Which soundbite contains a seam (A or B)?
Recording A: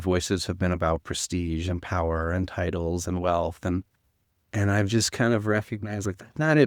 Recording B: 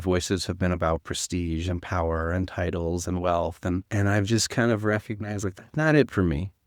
B